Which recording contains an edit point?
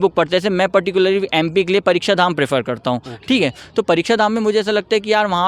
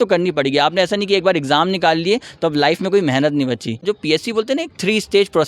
second; 1 cut; at 3.8 s

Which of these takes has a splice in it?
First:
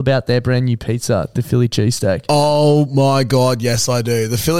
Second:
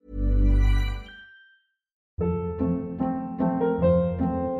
second; 1 cut; at 2.0 s

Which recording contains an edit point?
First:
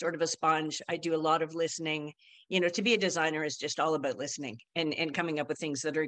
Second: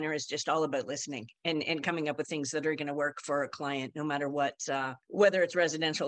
second; 1 cut; at 5.0 s

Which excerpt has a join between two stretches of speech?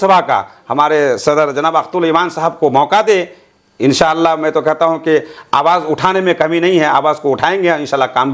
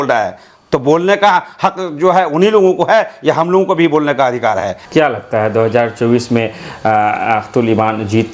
second; 1 cut; at 4.8 s

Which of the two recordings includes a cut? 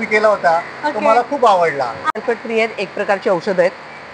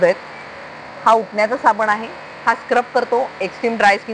first; 1 cut; at 2.0 s

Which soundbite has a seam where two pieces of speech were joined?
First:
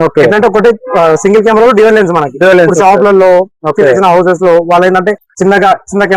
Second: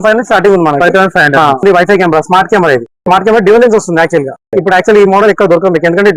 second; 1 cut; at 1.6 s

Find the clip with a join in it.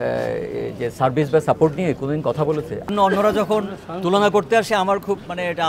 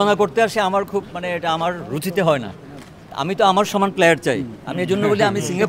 first; 1 cut; at 2.9 s

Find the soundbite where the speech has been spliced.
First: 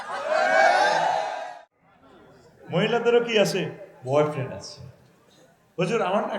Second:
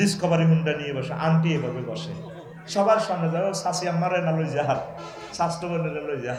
first; 1 cut; at 1.4 s

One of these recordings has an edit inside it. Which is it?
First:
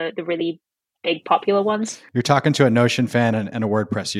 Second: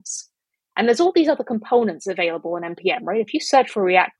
first; 1 cut; at 2.0 s

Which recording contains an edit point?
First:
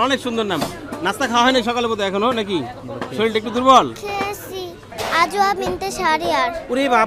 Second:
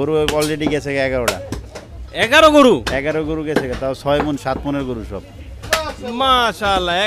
first; 1 cut; at 4.9 s

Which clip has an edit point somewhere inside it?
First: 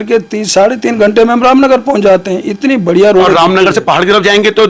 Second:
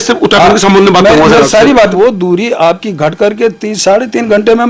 second; 1 cut; at 1.9 s

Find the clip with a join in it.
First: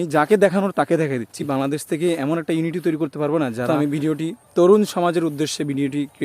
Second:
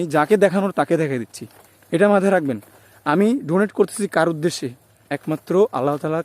first; 2 cuts; at 1.4 s, 3.7 s

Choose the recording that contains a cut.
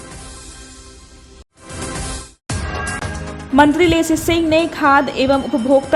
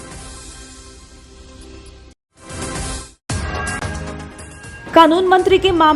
second; 1 cut; at 1.0 s

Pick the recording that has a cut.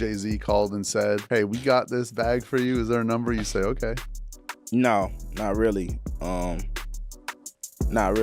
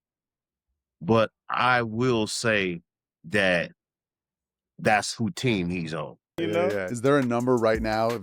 second; 1 cut; at 6.3 s

